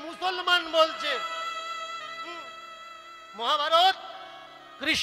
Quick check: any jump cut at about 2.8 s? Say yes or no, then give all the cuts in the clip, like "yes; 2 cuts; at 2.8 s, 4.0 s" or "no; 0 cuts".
no; 0 cuts